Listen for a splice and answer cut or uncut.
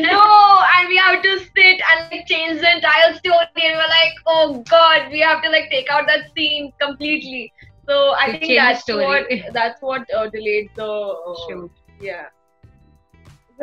uncut